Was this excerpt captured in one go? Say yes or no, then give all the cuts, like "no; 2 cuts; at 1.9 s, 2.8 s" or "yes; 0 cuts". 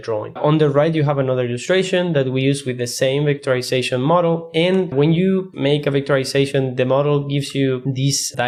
yes; 0 cuts